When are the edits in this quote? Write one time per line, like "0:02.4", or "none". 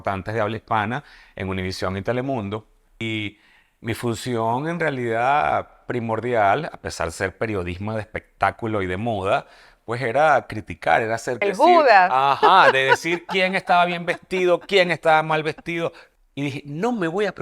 0:03.0
0:11.3
0:16.0

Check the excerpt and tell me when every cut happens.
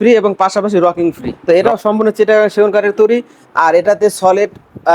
0:01.3

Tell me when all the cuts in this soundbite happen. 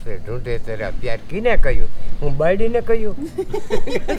none

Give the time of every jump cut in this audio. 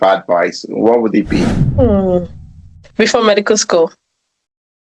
0:01.6

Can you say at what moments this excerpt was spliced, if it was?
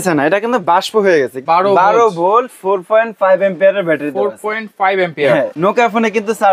0:01.4
0:05.5

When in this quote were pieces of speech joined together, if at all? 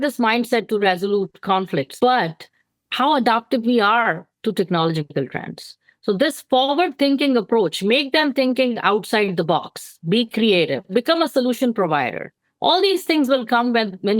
0:01.9
0:10.9

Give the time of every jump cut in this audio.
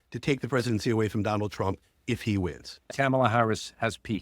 0:02.9

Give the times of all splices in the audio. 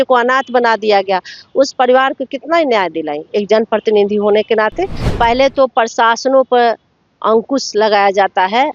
0:05.1

